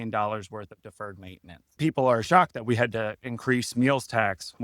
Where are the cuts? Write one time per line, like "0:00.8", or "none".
0:01.8